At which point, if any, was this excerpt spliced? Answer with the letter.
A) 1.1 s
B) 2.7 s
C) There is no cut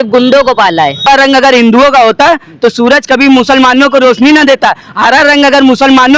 A